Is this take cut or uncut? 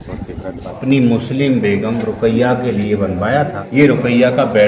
cut